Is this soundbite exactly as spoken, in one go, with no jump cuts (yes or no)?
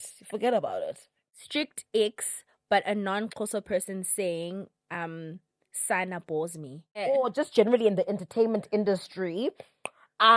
no